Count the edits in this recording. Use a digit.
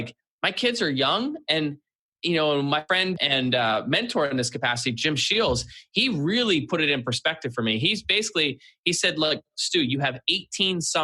1